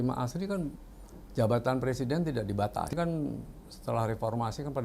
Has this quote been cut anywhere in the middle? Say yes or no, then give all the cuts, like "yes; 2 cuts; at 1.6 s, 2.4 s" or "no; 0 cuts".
yes; 1 cut; at 2.9 s